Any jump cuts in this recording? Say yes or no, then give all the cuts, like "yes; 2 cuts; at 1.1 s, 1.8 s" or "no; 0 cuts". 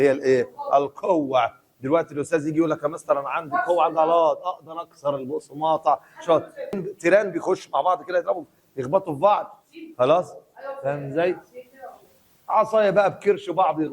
yes; 1 cut; at 6.8 s